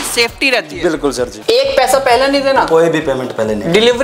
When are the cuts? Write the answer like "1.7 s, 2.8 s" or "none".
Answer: 1.4 s